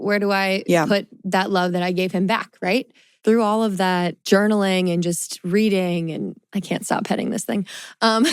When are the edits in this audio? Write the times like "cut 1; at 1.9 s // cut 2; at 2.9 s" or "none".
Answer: cut 1; at 2.9 s // cut 2; at 4.2 s

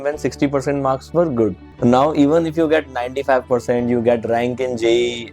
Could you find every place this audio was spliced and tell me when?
cut 1; at 1.6 s

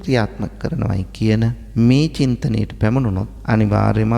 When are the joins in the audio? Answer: cut 1; at 1.6 s // cut 2; at 3.3 s

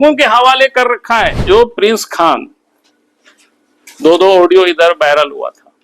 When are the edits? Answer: cut 1; at 1.4 s

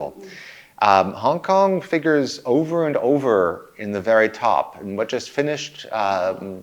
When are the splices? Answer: none

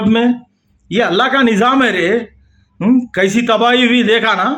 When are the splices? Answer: none

